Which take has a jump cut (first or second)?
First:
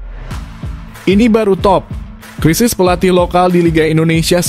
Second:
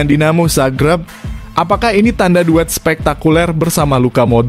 first